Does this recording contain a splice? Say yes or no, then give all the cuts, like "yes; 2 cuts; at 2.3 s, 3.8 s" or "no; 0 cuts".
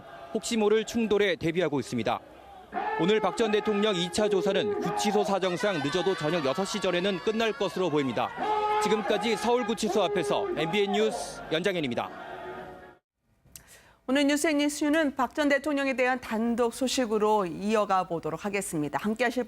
yes; 1 cut; at 12.3 s